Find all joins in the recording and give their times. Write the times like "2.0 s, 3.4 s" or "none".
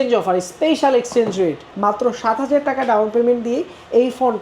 1.7 s